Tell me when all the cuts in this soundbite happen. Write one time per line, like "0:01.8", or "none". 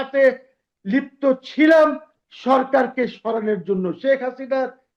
none